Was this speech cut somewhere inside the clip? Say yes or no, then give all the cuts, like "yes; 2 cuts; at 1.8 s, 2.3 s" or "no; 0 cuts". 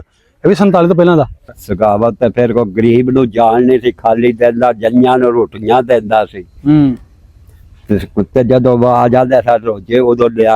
yes; 1 cut; at 1.5 s